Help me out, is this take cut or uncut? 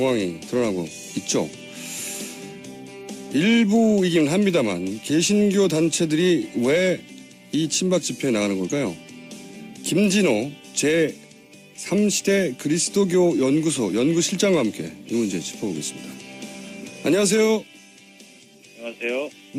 uncut